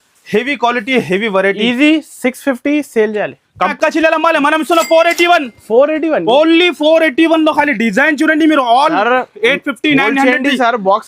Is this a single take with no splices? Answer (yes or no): no